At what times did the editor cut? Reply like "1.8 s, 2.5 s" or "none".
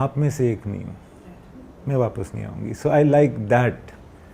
none